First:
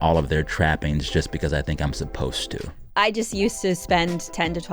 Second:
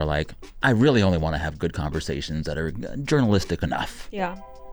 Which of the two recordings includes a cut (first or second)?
first